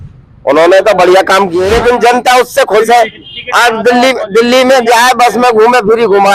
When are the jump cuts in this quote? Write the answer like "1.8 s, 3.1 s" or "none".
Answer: 1.6 s